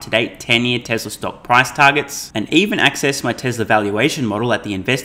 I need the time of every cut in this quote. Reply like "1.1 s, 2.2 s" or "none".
none

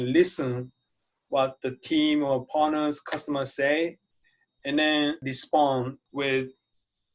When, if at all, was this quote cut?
5.2 s, 6.0 s

